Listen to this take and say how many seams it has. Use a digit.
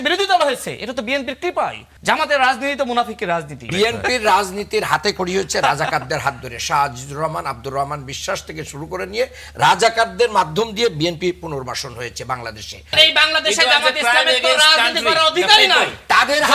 3